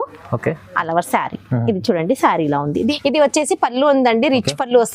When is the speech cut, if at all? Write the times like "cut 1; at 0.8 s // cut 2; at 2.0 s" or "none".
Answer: cut 1; at 2.9 s